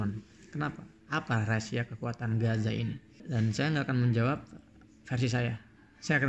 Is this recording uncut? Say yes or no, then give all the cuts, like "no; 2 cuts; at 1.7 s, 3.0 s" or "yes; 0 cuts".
no; 1 cut; at 3.1 s